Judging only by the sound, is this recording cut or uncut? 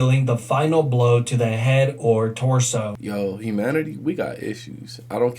cut